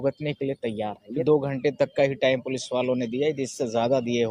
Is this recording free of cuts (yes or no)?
no